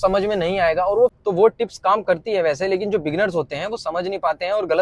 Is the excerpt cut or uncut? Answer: cut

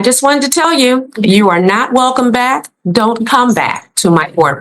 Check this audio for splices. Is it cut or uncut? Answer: uncut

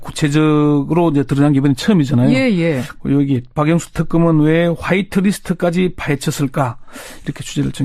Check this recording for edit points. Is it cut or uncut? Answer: cut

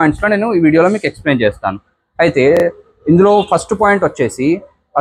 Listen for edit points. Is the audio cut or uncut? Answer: uncut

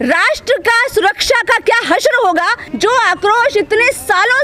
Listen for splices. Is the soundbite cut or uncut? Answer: cut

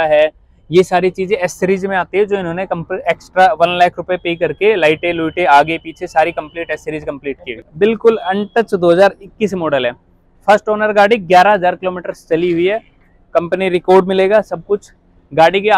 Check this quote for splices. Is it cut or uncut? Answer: cut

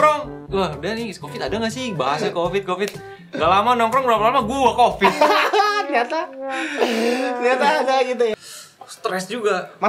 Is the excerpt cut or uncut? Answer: cut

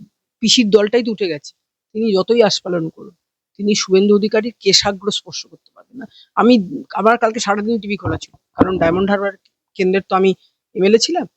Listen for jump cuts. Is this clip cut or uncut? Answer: uncut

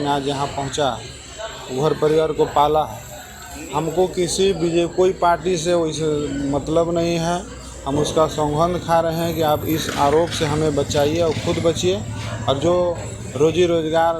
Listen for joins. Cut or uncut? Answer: uncut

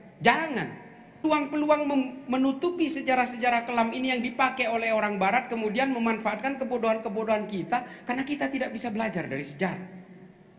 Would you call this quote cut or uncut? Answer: cut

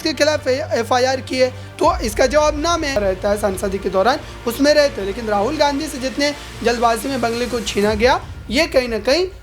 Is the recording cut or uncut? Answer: cut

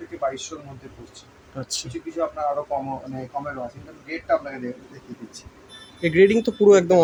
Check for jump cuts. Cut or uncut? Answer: uncut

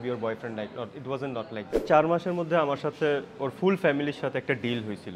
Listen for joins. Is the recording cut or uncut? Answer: cut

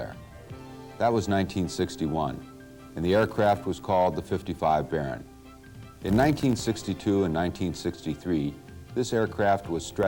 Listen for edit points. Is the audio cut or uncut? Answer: uncut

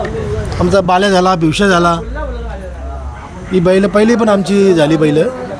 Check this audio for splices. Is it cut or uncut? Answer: uncut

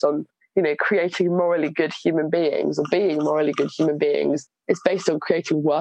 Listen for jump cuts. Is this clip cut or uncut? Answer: uncut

